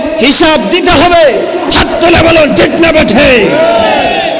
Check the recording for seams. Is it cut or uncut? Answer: uncut